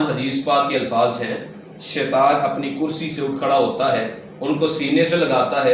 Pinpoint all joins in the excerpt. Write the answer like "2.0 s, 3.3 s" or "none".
none